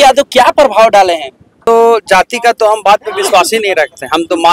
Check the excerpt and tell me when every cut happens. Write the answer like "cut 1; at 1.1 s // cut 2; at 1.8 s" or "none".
cut 1; at 1.7 s